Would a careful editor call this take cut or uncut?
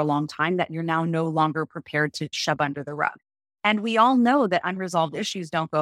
cut